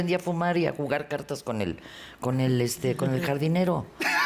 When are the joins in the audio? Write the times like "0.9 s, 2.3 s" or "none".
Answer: none

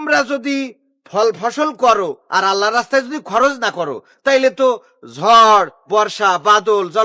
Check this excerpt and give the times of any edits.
none

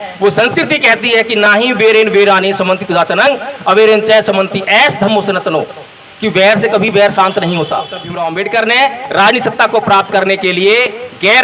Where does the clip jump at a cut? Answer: 8.0 s

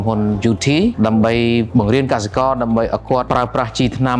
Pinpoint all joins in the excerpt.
0.9 s, 1.7 s, 3.2 s

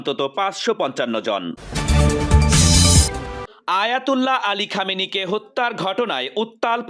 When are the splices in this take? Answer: 1.6 s, 3.5 s

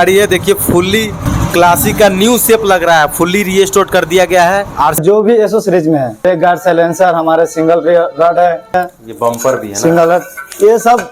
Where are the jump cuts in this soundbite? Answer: 1.3 s, 5.0 s, 6.2 s, 8.8 s

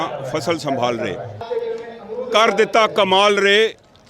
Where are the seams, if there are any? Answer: 1.4 s

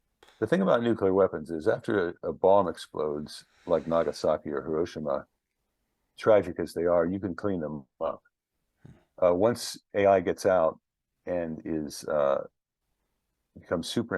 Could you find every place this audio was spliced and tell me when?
none

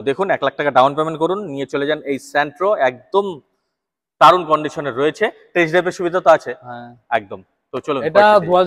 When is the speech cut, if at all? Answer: none

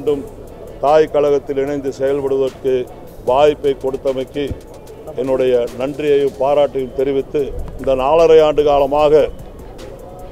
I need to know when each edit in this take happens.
7.6 s

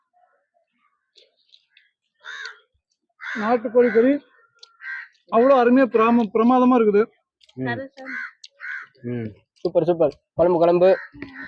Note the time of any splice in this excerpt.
none

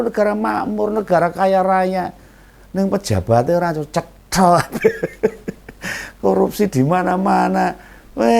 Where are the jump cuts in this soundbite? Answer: none

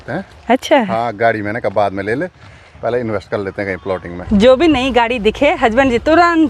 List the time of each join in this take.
4.1 s

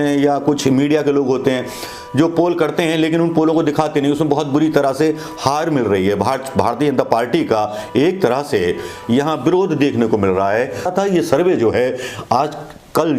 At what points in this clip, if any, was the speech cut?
10.9 s

